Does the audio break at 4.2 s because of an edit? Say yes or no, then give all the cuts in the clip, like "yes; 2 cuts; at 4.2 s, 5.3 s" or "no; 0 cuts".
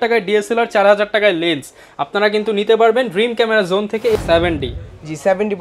yes; 1 cut; at 4.2 s